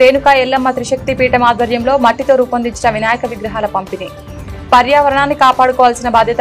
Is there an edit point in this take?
no; 0 cuts

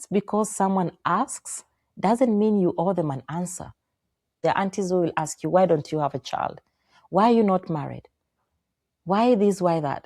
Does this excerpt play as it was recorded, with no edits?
no; 1 cut; at 4.3 s

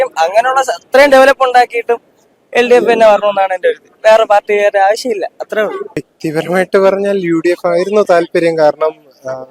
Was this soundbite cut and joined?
yes; 1 cut; at 6.1 s

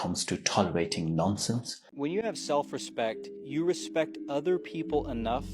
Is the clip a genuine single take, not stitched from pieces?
no; 1 cut; at 1.8 s

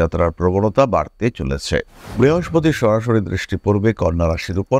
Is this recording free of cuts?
no; 1 cut; at 2.0 s

